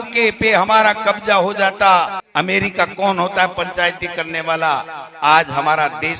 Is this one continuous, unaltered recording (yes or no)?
no